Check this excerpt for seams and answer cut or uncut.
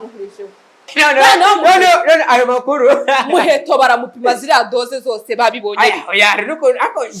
cut